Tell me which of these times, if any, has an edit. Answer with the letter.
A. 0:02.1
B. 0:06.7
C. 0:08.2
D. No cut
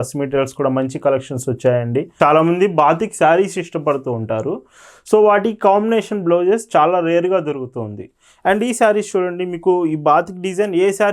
A